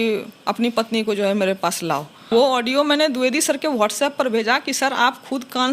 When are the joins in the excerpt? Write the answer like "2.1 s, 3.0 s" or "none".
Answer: 2.2 s